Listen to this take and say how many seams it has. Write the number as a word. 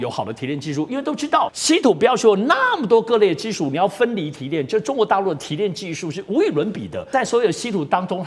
two